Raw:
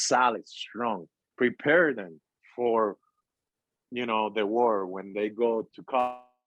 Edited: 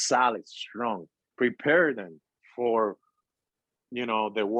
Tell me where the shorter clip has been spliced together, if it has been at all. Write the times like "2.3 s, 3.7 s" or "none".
none